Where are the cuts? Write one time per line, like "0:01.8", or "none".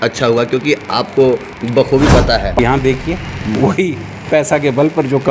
0:02.6